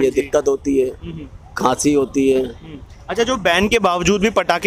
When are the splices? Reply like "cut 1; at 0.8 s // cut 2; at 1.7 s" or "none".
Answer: none